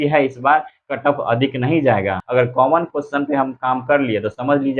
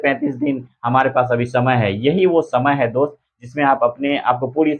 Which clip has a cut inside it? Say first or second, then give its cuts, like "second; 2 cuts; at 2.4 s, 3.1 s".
first; 1 cut; at 2.2 s